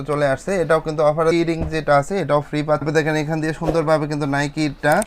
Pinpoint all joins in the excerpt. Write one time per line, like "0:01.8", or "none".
0:01.3
0:02.9